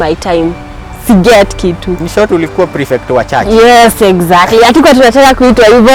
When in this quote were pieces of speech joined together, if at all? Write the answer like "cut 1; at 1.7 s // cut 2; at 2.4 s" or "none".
cut 1; at 1.9 s